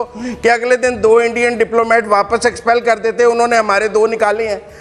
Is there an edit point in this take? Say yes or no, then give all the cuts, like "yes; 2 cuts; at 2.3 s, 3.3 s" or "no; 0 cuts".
no; 0 cuts